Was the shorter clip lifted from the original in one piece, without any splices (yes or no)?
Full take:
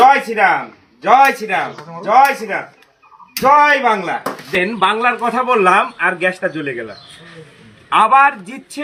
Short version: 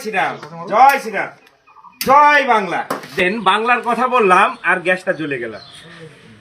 yes